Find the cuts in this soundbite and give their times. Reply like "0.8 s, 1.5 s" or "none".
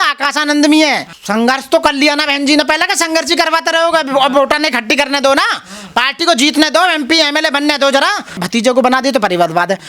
1.1 s, 8.4 s